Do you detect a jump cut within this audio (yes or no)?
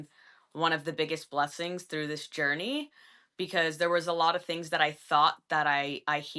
no